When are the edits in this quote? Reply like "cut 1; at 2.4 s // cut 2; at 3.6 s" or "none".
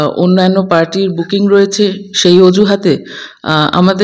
none